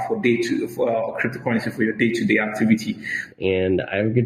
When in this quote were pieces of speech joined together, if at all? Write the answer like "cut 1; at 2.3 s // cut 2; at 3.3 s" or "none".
cut 1; at 3.3 s